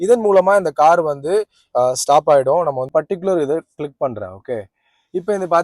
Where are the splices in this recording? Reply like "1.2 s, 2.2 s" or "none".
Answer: 2.9 s